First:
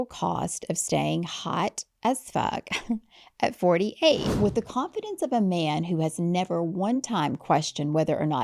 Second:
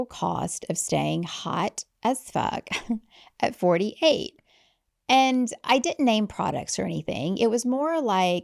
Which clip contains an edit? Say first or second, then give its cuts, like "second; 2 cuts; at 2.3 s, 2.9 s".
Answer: first; 1 cut; at 4.3 s